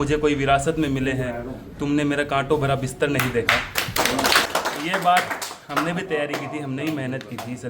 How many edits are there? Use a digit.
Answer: 1